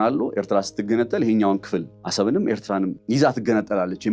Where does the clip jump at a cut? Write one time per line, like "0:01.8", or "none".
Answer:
0:02.0
0:03.0